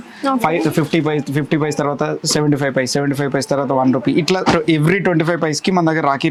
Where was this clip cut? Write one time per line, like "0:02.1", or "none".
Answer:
none